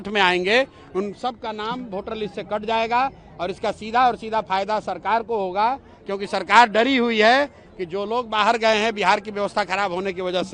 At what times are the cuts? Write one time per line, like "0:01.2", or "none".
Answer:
none

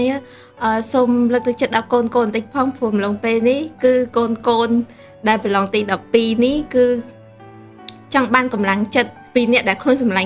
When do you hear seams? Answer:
0:09.2

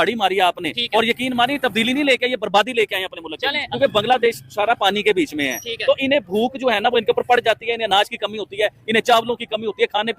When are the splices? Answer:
0:03.7

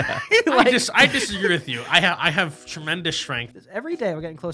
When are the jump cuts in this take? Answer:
0:03.5

